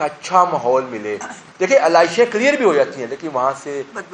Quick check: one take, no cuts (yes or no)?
yes